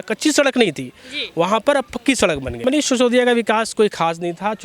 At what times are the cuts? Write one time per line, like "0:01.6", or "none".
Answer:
0:02.5